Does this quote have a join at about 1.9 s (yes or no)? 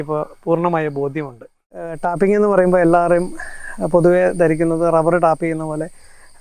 yes